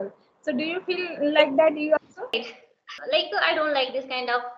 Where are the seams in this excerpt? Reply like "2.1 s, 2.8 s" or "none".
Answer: 2.5 s